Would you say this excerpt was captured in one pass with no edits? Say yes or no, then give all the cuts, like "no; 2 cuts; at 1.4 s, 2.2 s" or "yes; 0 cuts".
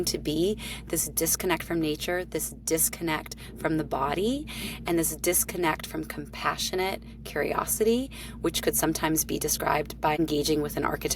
no; 1 cut; at 10.2 s